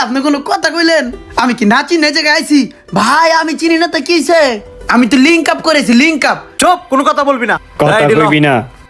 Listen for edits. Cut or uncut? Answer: cut